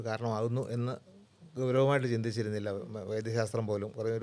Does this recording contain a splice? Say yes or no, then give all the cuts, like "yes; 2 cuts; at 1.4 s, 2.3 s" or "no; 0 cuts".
no; 0 cuts